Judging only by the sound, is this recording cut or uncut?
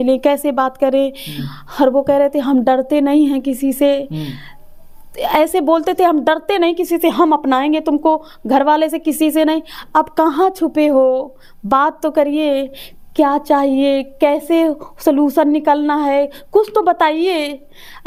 uncut